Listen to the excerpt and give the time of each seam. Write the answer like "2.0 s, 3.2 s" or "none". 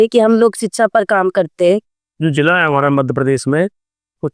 2.0 s